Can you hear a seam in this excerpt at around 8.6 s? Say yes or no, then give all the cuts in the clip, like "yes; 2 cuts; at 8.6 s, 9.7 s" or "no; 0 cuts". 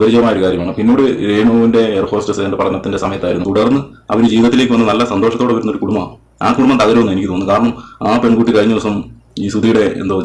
no; 1 cut; at 3.4 s